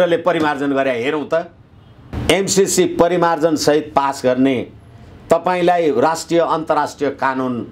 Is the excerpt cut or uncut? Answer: cut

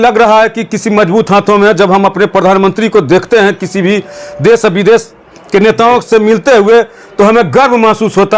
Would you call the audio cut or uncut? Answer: uncut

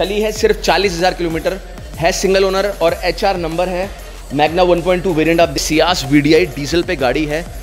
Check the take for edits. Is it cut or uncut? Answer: cut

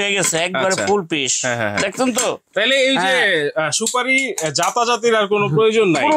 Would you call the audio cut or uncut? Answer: uncut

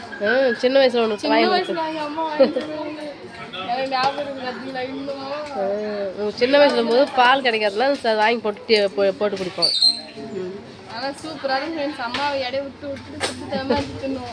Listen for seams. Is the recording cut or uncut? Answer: uncut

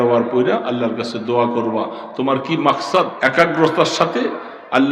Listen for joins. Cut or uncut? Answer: cut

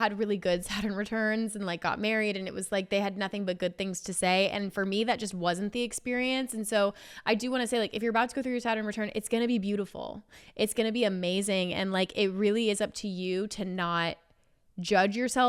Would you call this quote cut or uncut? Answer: uncut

